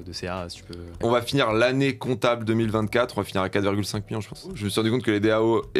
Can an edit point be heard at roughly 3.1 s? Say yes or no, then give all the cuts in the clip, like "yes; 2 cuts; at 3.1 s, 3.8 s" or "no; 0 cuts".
no; 2 cuts; at 1.0 s, 4.6 s